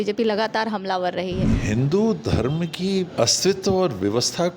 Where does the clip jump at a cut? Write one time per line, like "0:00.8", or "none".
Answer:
0:01.6
0:03.1